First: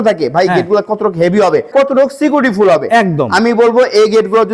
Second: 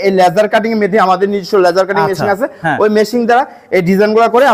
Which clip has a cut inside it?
first; 1 cut; at 1.7 s

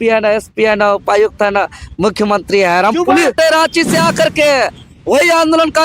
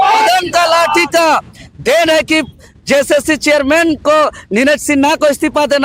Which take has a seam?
first; 1 cut; at 3.4 s

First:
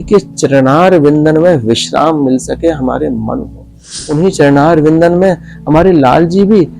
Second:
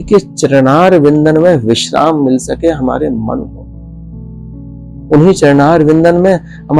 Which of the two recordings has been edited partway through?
first; 1 cut; at 4.1 s

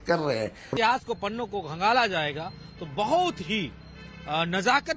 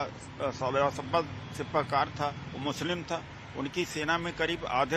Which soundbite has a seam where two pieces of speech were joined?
second; 1 cut; at 3.4 s

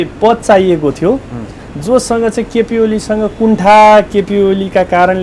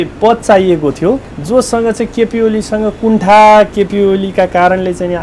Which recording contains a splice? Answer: second; 1 cut; at 1.3 s

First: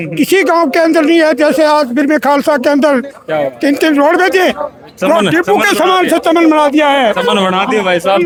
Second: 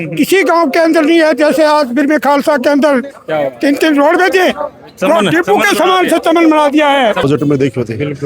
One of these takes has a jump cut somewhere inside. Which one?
second; 1 cut; at 7.2 s

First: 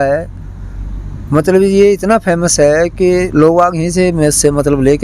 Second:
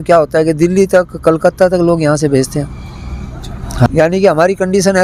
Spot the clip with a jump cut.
second; 1 cut; at 3.9 s

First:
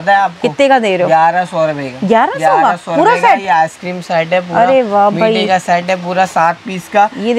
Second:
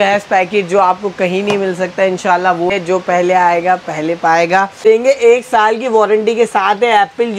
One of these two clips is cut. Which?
second; 2 cuts; at 2.7 s, 4.8 s

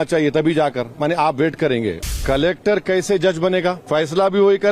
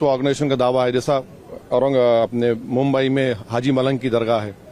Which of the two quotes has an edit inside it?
first; 2 cuts; at 2.2 s, 3.8 s

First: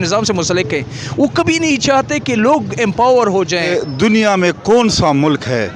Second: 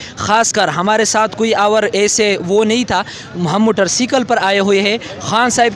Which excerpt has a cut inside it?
first; 1 cut; at 3.7 s

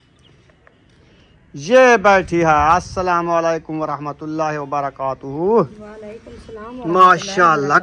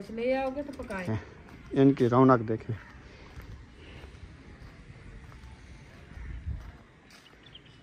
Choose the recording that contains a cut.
second; 1 cut; at 1.1 s

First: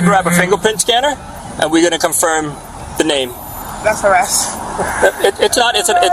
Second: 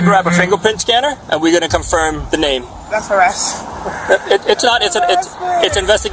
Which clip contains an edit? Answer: second; 2 cuts; at 1.2 s, 2.5 s

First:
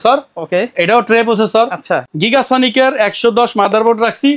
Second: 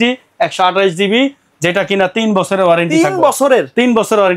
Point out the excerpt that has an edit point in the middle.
first; 1 cut; at 2.1 s

